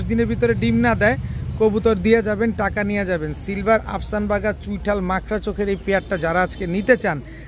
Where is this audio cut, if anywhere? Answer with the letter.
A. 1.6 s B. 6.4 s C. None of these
C